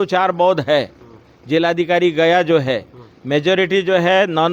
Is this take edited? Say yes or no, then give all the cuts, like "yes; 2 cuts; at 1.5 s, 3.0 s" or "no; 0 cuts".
no; 0 cuts